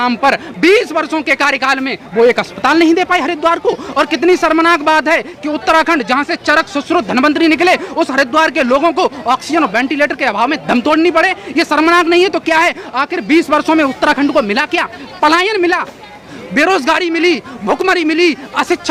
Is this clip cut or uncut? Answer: uncut